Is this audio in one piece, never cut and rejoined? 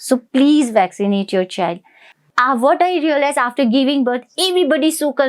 no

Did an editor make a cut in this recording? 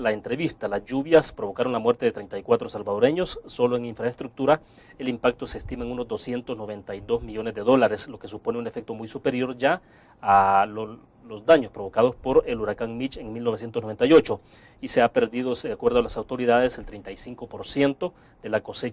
yes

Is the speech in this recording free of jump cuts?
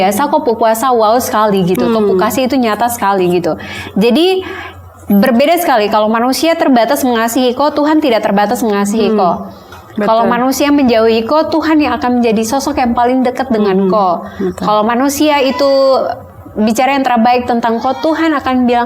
yes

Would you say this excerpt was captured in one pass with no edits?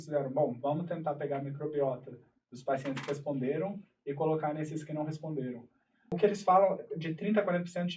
no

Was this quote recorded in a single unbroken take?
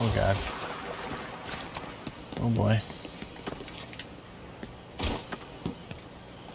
no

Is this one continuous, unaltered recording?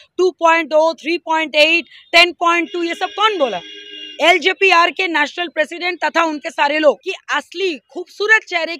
no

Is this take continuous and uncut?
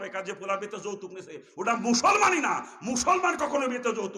yes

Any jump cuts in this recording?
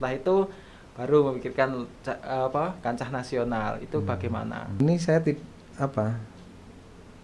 yes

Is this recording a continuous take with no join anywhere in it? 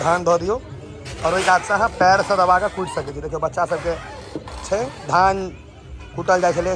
yes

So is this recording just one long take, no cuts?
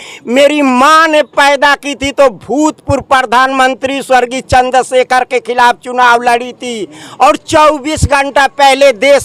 yes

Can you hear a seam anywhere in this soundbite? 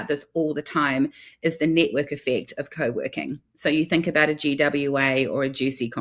no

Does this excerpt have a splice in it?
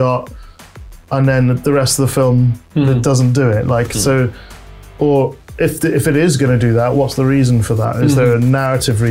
no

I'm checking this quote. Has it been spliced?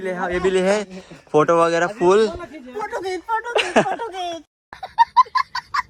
no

